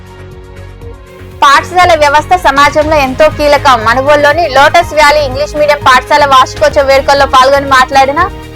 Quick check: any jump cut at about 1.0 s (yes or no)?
yes